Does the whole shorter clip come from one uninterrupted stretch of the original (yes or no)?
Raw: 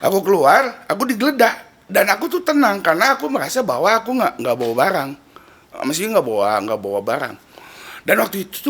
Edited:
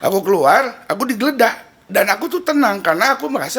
yes